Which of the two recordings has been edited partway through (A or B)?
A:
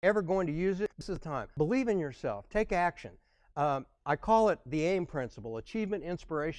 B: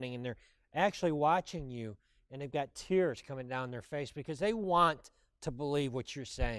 A